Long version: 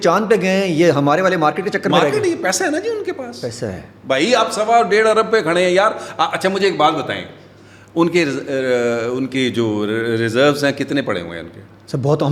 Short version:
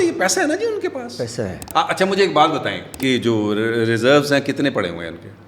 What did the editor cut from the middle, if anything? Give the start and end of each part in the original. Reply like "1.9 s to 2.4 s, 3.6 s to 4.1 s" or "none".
3.9 s to 6.1 s, 7.4 s to 9.3 s